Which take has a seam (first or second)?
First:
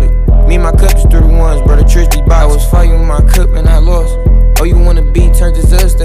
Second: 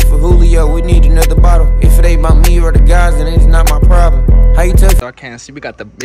second